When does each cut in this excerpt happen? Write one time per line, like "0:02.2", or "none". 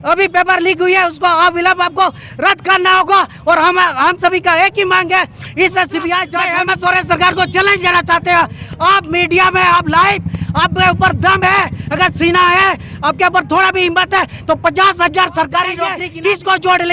0:06.4
0:16.0